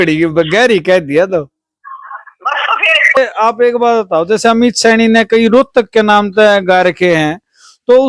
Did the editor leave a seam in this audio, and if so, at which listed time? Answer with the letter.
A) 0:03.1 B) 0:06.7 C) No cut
A